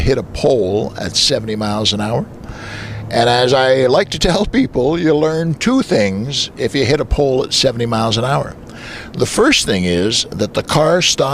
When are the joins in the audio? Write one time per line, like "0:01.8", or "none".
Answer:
0:05.5